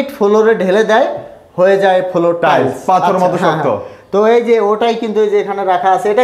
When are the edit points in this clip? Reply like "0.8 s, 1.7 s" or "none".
none